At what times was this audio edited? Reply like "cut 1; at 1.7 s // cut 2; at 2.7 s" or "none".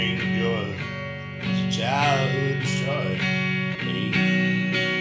cut 1; at 3.7 s